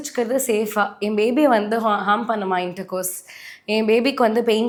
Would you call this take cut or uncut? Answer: uncut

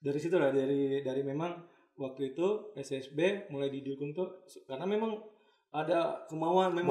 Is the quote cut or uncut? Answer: uncut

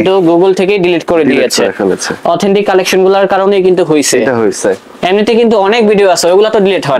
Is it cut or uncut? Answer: uncut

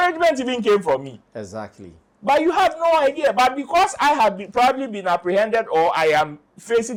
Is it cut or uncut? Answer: uncut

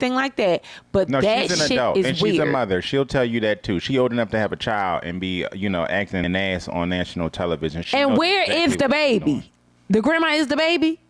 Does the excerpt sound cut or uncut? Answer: cut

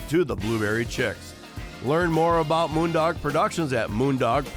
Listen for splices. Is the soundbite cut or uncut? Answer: uncut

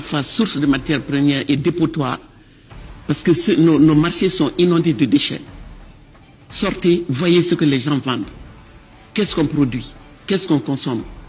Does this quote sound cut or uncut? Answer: uncut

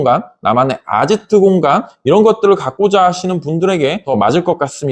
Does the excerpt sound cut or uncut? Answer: uncut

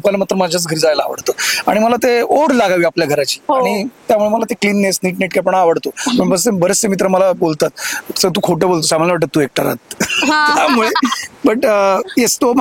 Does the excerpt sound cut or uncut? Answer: uncut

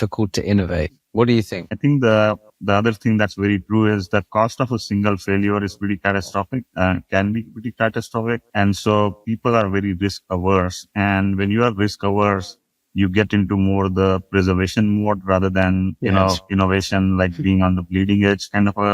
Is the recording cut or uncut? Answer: cut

